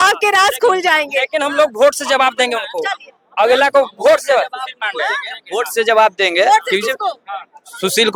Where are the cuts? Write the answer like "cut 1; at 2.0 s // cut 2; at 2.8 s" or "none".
none

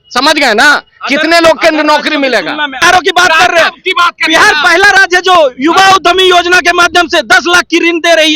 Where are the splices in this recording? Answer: cut 1; at 2.8 s

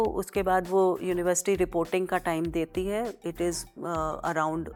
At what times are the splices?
none

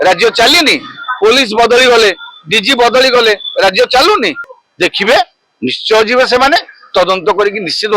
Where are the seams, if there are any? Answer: cut 1; at 4.5 s

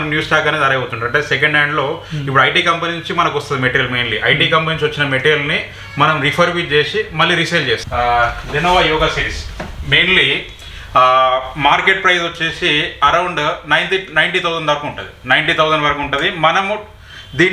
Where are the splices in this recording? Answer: cut 1; at 7.8 s

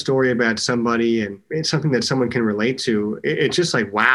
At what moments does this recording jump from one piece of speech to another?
cut 1; at 1.4 s

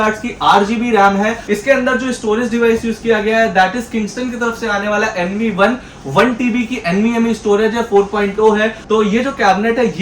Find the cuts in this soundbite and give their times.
cut 1; at 1.4 s // cut 2; at 8.8 s

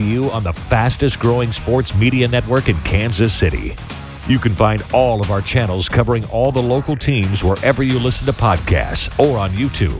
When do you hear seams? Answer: none

